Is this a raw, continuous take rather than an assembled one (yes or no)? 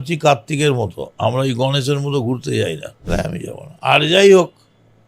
no